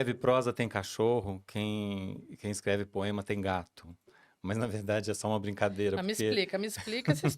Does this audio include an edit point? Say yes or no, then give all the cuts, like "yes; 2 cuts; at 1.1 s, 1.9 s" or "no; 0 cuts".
no; 0 cuts